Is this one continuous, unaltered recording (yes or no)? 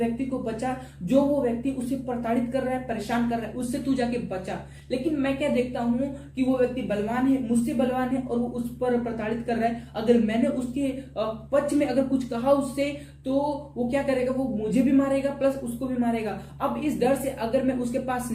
yes